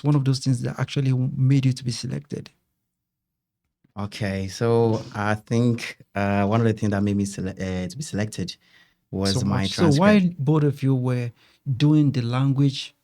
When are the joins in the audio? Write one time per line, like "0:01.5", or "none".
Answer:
0:09.7